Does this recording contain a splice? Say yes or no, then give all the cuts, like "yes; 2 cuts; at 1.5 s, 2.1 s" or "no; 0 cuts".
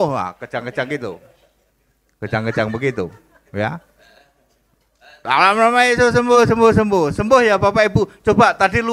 no; 0 cuts